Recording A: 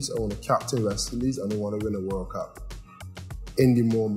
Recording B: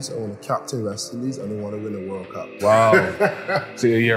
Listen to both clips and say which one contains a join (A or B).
B